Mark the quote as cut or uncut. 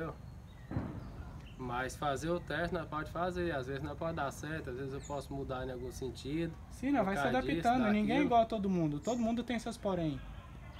uncut